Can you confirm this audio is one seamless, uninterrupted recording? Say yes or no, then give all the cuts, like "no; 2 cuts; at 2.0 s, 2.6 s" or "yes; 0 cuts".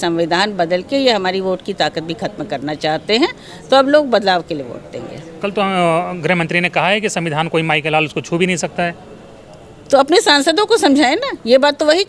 yes; 0 cuts